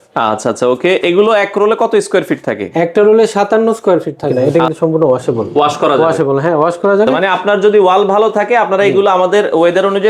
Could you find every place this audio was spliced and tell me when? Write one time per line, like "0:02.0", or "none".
0:04.3
0:07.4